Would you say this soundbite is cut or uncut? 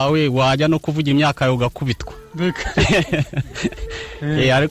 uncut